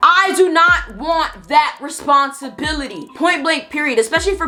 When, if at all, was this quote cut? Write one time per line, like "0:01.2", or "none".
none